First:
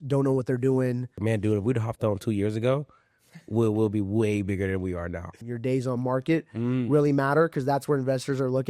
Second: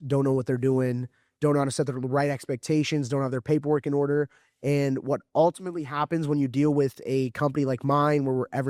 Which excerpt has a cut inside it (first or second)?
first